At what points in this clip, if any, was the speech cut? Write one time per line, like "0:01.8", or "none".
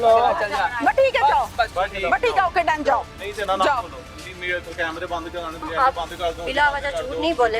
0:01.6
0:05.6